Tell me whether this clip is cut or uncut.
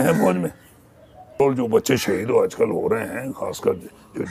cut